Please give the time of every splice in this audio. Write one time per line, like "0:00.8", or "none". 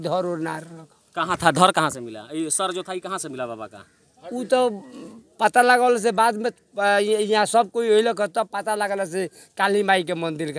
none

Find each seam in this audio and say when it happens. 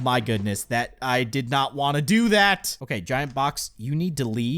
0:02.7

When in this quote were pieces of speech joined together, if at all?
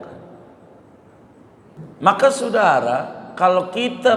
0:01.8

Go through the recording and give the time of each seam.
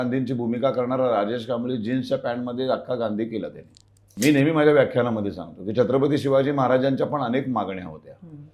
0:04.1

